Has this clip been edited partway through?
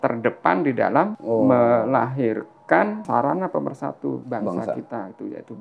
yes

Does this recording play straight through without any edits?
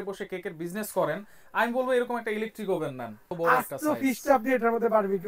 no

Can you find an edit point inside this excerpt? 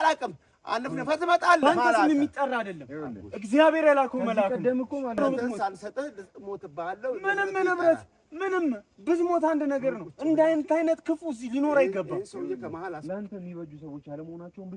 yes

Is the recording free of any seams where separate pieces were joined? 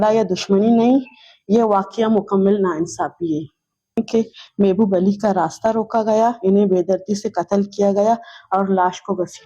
no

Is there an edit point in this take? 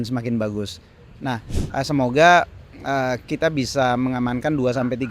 yes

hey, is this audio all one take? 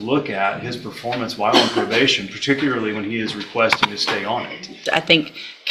no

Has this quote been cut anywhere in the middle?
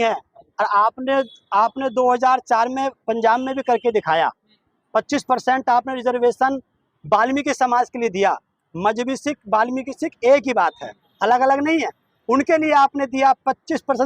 no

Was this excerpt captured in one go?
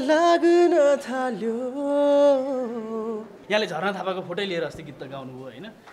no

